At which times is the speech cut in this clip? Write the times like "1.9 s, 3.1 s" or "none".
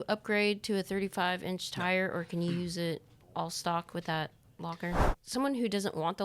5.1 s